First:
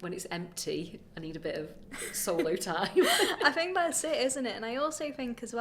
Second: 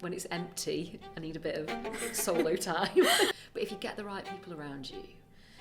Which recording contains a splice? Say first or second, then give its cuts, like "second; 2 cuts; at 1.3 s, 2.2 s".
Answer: second; 1 cut; at 3.3 s